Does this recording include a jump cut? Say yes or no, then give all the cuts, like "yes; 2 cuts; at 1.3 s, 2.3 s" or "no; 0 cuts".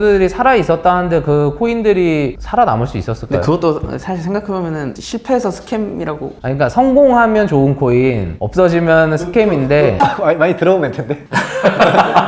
no; 0 cuts